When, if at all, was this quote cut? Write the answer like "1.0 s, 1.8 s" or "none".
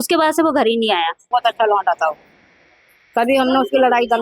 1.2 s

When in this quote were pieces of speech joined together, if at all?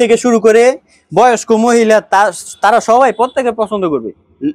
none

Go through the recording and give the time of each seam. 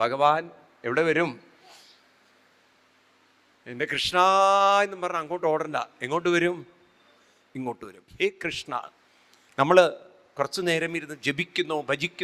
8.0 s

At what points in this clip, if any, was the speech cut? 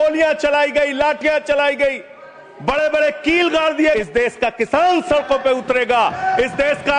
4.0 s

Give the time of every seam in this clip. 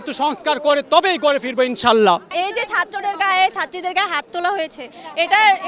none

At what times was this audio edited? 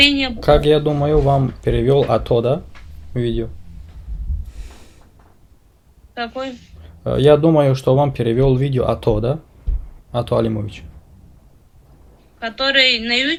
none

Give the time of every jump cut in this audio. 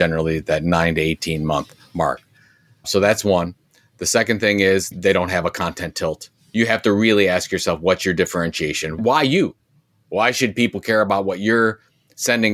4.9 s

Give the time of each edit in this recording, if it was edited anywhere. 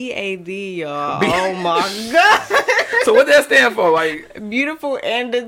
none

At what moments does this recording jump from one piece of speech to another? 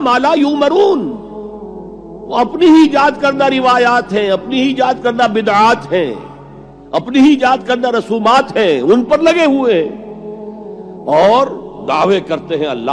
none

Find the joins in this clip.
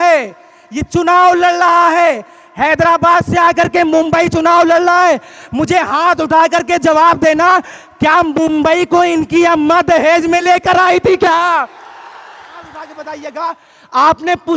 12.9 s

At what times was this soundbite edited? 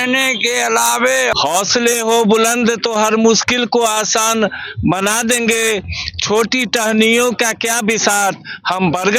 1.3 s

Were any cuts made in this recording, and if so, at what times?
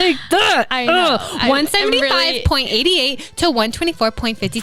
none

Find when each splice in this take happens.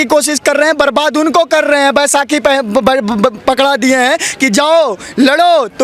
none

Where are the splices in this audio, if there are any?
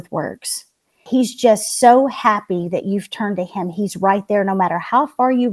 0.9 s

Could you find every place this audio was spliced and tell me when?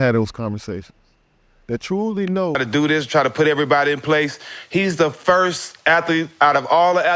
2.6 s

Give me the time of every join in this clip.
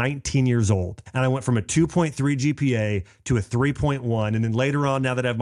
1.0 s

